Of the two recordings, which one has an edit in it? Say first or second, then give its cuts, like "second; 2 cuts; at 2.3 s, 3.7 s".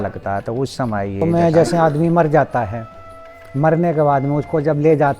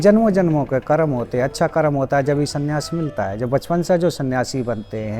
first; 1 cut; at 1.2 s